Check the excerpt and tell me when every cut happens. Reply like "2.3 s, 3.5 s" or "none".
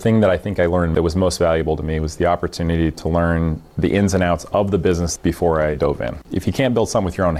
0.9 s, 5.1 s, 6.3 s